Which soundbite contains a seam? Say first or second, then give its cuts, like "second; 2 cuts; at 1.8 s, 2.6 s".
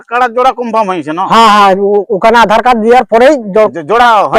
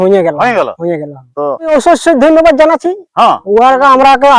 second; 1 cut; at 1.7 s